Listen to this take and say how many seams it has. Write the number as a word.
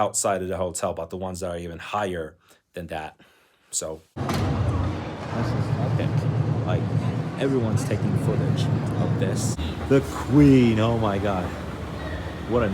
two